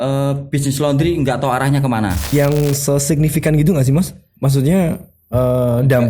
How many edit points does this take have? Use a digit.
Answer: 1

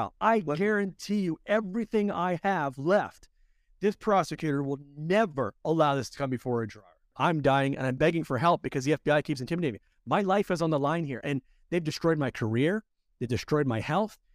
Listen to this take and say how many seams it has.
1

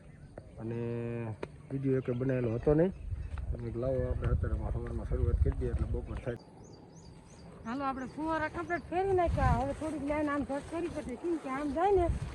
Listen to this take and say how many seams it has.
1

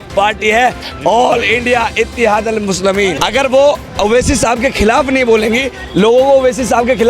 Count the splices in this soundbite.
1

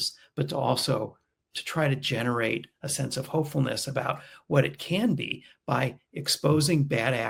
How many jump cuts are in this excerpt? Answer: 0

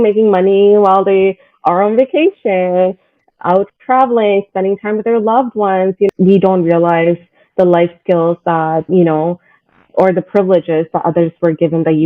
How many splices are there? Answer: 1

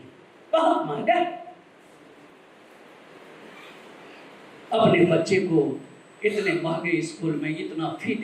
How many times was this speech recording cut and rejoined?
1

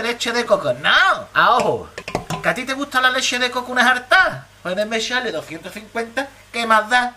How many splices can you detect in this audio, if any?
1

